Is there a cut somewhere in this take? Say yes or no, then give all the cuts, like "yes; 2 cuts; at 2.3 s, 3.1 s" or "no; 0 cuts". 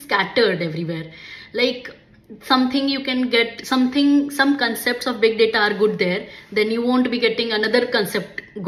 no; 0 cuts